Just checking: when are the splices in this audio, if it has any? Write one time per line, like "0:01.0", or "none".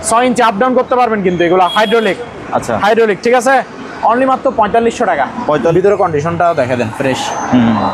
0:05.7